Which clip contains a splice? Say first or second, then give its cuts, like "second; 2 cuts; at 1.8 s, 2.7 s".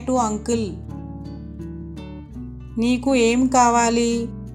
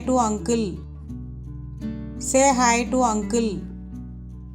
second; 3 cuts; at 0.8 s, 2.1 s, 3.6 s